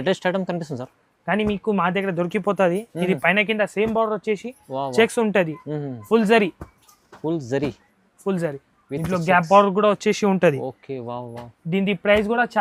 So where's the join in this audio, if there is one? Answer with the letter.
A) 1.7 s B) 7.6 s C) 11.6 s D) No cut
D